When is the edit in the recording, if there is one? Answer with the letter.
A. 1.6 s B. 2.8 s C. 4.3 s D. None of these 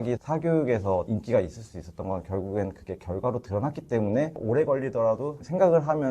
C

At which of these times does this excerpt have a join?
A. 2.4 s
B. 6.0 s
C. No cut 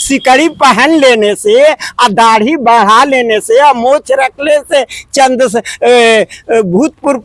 C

